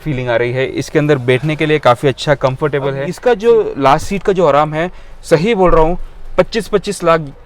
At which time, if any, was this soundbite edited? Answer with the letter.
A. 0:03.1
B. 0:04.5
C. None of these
A